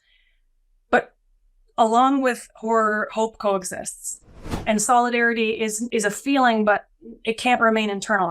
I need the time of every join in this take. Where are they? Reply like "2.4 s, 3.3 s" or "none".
4.6 s, 5.8 s

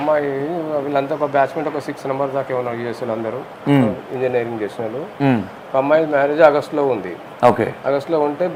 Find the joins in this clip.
none

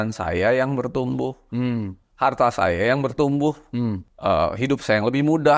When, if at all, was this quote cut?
4.1 s

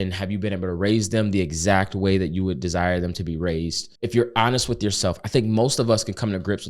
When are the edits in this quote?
3.8 s

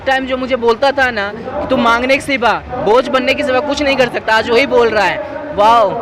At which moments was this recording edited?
none

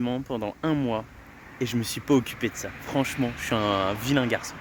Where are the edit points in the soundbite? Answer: none

